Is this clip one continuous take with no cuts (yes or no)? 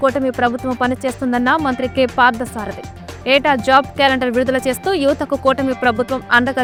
yes